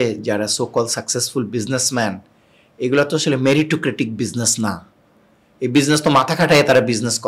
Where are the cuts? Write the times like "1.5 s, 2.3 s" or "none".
none